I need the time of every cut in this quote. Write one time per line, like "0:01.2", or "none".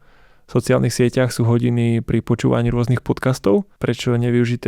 0:03.7